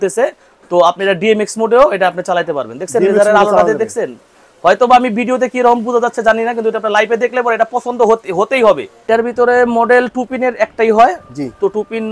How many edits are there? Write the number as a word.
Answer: one